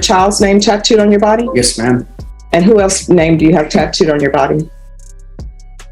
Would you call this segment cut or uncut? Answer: cut